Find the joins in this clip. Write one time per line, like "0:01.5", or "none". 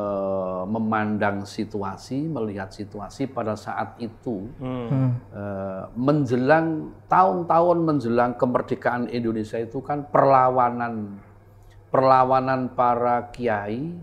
none